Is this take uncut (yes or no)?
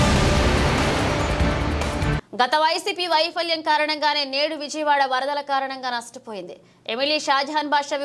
no